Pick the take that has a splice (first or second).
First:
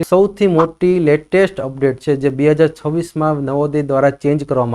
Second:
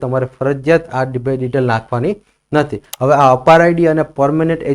second